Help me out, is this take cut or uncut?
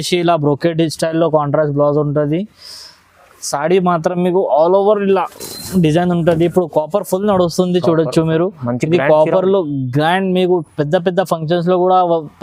uncut